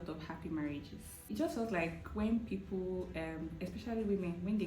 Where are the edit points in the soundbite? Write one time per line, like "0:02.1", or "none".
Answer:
0:01.2